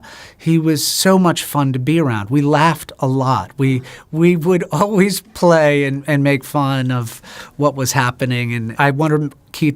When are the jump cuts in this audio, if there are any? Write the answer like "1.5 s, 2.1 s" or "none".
8.7 s